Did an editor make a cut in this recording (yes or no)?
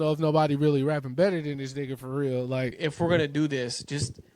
yes